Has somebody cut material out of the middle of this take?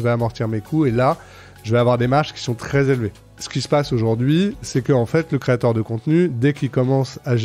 yes; 2 cuts; at 3.3 s, 4.6 s

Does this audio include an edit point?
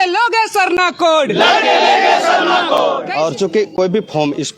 yes; 1 cut; at 3.0 s

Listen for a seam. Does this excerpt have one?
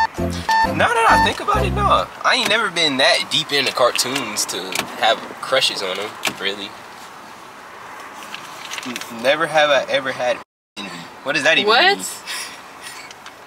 yes; 1 cut; at 8.1 s

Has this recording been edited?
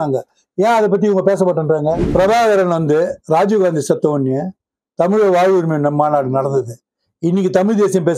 yes; 1 cut; at 2.0 s

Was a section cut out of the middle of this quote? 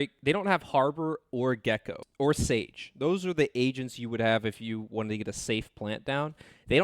yes; 1 cut; at 2.0 s

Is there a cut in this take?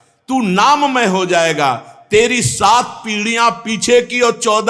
no; 0 cuts

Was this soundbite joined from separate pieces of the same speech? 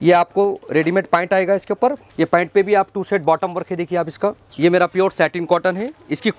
yes; 2 cuts; at 2.0 s, 4.4 s

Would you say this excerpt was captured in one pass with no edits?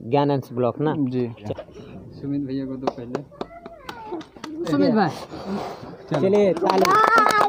no; 2 cuts; at 1.4 s, 4.7 s

